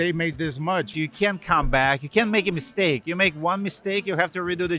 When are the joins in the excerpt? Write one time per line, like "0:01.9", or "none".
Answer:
0:00.9

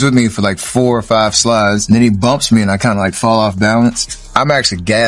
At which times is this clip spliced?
0:01.8
0:04.3

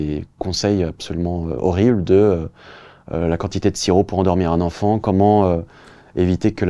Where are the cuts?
none

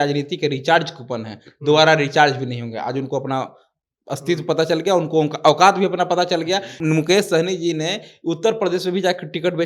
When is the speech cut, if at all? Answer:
0:06.7

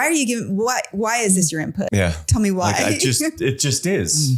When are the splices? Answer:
0:01.9

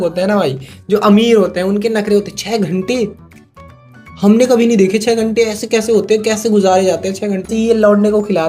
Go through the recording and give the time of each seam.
0:07.5

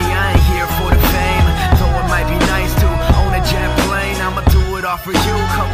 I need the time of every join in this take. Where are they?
none

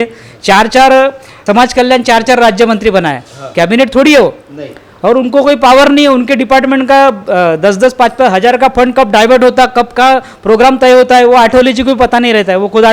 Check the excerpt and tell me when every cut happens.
0:01.4

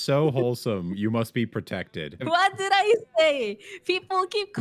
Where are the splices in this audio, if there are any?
0:02.2

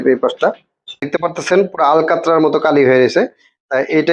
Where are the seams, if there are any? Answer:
0:01.1

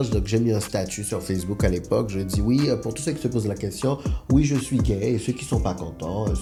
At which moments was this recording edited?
none

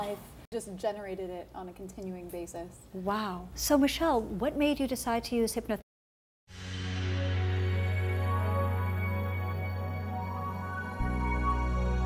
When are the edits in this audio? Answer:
none

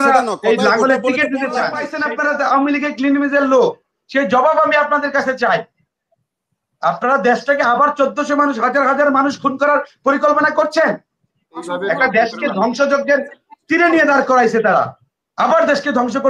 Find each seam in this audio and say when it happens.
0:01.9
0:11.6

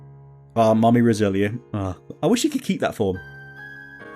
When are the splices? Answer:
none

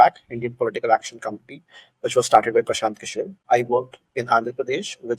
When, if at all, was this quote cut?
0:03.3

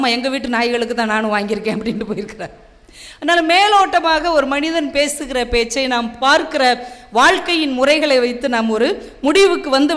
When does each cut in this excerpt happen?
none

